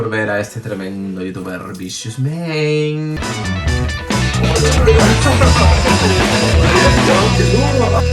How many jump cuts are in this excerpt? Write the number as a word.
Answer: one